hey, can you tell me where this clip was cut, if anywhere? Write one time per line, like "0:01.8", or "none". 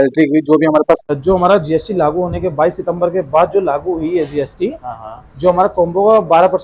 0:01.1